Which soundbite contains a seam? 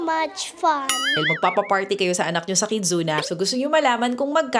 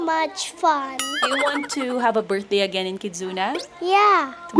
first; 1 cut; at 1.2 s

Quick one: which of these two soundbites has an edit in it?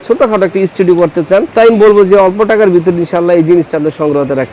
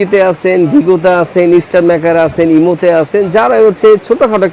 first; 1 cut; at 1.5 s

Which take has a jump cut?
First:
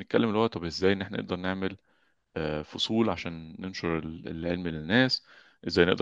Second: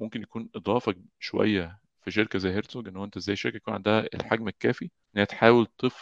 second; 1 cut; at 4.9 s

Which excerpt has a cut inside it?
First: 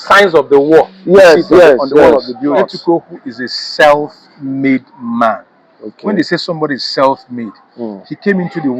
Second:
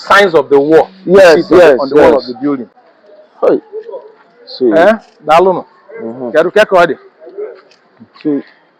first; 1 cut; at 2.6 s

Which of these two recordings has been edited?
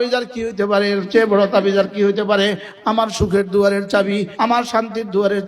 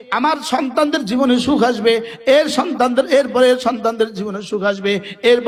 first; 2 cuts; at 2.7 s, 4.3 s

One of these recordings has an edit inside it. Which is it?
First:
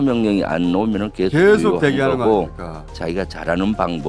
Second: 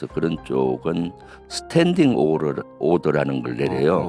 first; 1 cut; at 2.9 s

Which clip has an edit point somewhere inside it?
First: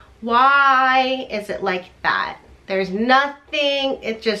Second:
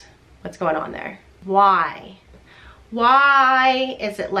second; 1 cut; at 1.3 s

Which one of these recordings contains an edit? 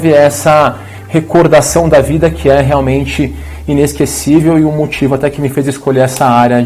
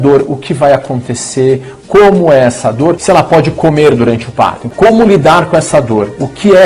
second; 2 cuts; at 3.0 s, 4.7 s

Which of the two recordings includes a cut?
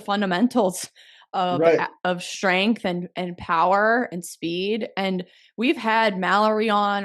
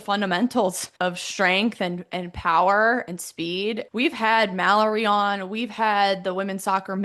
second; 2 cuts; at 0.9 s, 3.8 s

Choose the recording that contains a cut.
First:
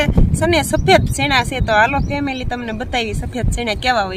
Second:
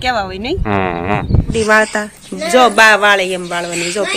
second; 1 cut; at 1.5 s

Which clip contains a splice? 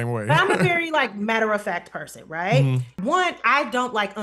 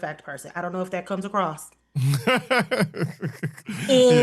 first; 1 cut; at 2.9 s

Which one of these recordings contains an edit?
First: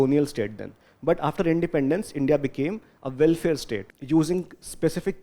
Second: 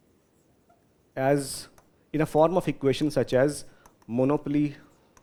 first; 1 cut; at 3.9 s

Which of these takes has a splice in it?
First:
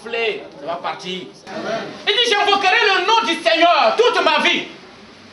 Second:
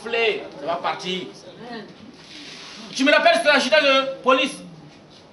first; 1 cut; at 1.4 s

